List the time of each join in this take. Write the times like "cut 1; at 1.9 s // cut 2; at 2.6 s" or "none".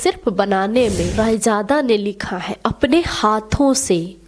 cut 1; at 1.1 s